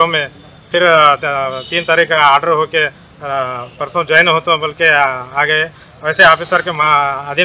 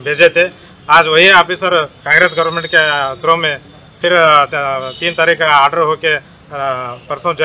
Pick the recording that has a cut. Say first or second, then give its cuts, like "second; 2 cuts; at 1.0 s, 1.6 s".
second; 1 cut; at 2.0 s